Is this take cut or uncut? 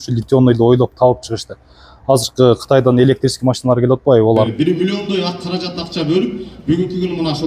cut